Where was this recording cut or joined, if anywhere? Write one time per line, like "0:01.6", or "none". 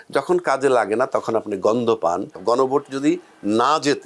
0:02.4